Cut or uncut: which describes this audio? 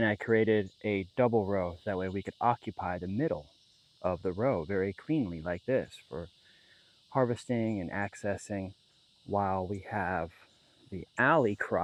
uncut